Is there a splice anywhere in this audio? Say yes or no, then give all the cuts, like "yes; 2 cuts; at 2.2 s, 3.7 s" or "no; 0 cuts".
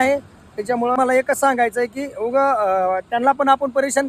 yes; 1 cut; at 0.9 s